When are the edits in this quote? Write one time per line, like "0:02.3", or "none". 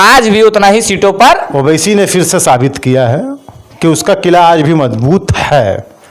0:01.5